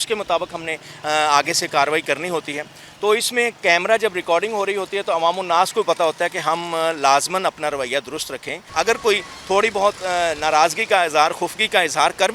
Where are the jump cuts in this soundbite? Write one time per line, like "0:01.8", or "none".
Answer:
0:08.6